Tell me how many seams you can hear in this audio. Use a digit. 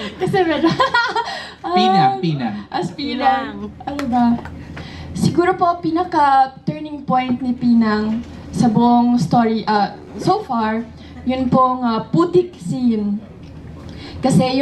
0